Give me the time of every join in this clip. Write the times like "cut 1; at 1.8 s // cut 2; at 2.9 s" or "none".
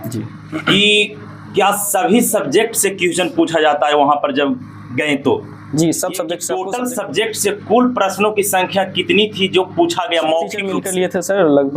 cut 1; at 6.5 s // cut 2; at 10.8 s

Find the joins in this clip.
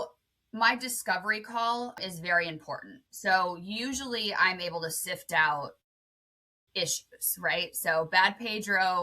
cut 1; at 2.0 s

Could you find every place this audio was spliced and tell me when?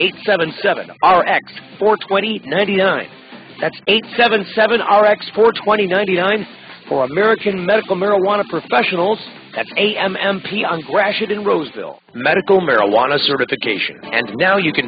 cut 1; at 12.2 s

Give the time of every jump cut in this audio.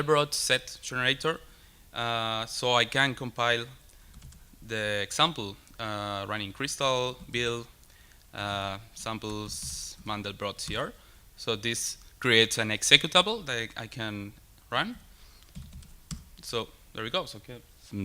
cut 1; at 11.6 s

